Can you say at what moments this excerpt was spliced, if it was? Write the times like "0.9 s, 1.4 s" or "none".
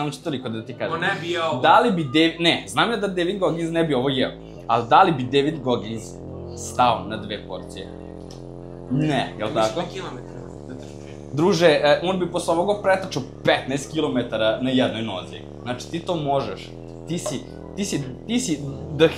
none